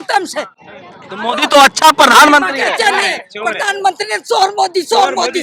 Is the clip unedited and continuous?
yes; 0 cuts

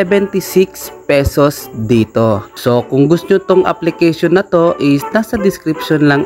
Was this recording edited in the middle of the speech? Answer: yes; 1 cut; at 2.5 s

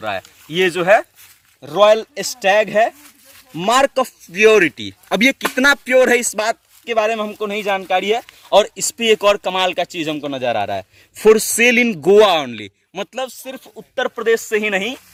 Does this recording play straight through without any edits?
yes; 0 cuts

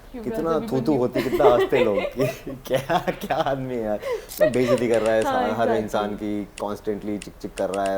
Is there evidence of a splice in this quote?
yes; 1 cut; at 4.2 s

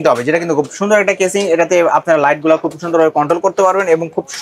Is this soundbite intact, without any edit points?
yes; 0 cuts

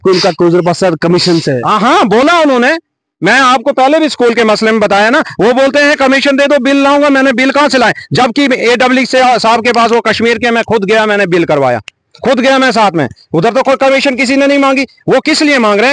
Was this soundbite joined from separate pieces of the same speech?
no; 0 cuts

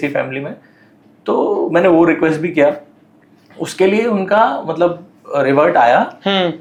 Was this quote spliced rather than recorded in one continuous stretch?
no; 0 cuts

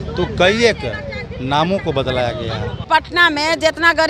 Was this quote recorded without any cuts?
no; 1 cut; at 2.8 s

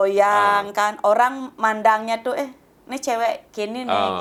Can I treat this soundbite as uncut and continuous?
yes; 0 cuts

